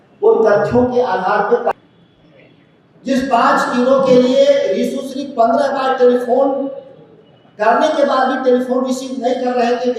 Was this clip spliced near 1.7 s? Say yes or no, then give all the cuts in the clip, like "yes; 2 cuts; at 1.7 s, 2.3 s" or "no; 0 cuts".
yes; 1 cut; at 1.7 s